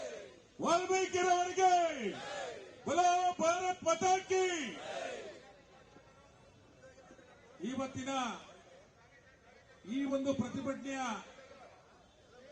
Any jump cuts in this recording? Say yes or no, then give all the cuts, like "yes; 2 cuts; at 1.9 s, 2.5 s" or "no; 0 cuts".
yes; 1 cut; at 7.6 s